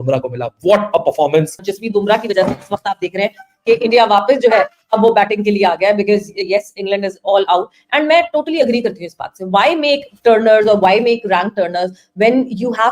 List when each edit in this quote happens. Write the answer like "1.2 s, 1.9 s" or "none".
1.7 s